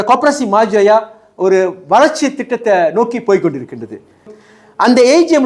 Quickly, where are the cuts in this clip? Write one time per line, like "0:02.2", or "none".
0:04.4